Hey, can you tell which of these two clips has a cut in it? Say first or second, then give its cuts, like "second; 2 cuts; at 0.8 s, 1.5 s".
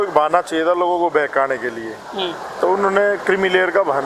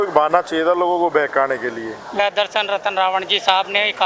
second; 1 cut; at 2.1 s